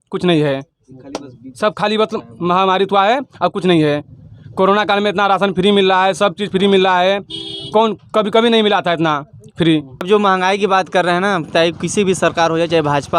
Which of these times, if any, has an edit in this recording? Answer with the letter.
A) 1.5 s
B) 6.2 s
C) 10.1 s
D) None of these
C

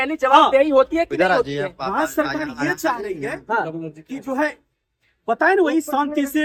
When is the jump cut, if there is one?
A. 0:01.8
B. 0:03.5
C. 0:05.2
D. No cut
D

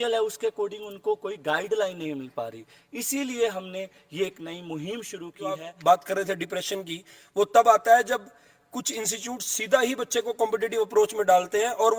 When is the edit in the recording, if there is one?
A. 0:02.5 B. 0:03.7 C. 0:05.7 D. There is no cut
C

